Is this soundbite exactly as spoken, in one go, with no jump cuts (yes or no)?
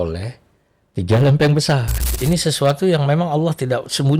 no